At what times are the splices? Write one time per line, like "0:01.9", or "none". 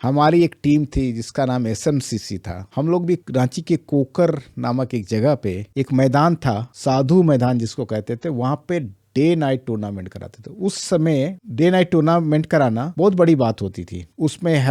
none